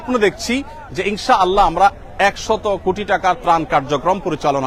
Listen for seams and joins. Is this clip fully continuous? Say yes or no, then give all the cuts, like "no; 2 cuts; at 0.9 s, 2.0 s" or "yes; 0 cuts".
yes; 0 cuts